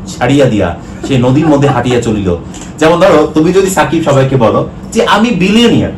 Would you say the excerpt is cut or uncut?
cut